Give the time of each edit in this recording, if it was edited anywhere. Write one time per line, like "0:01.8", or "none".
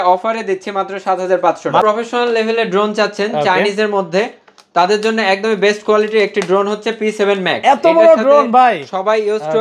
0:01.8